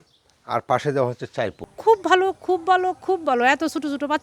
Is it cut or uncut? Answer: cut